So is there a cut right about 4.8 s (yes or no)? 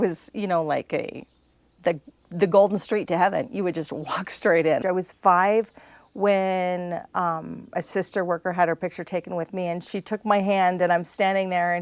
yes